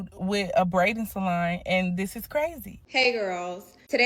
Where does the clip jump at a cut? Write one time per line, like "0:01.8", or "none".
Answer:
0:02.9